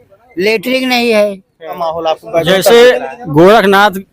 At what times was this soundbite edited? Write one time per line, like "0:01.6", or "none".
0:01.8